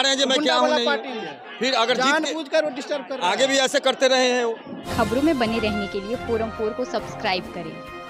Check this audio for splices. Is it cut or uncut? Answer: uncut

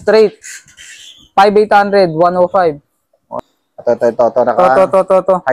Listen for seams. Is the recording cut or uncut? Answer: cut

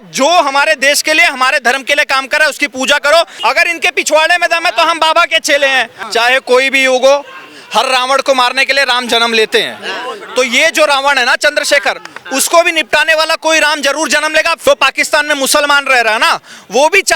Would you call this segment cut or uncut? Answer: cut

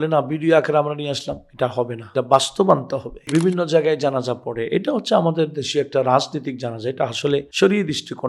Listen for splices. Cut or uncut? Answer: cut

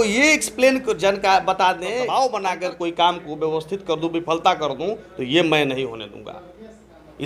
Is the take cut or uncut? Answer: cut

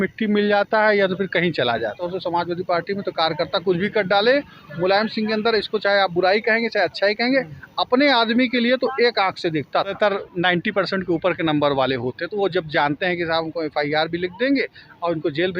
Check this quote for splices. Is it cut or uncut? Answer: cut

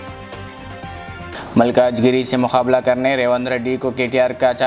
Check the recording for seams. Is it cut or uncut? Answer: cut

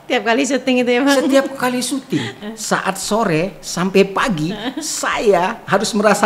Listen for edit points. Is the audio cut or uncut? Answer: cut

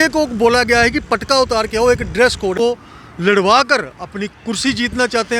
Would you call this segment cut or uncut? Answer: cut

